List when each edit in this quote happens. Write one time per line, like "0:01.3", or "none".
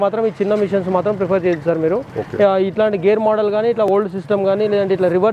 0:03.9